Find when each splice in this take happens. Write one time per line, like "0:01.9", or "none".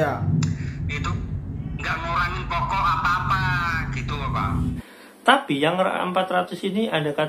0:04.7